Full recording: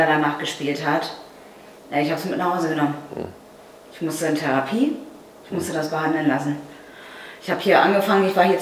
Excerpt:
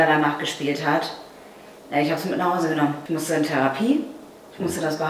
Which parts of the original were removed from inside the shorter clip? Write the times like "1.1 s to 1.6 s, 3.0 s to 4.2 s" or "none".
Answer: 3.0 s to 3.9 s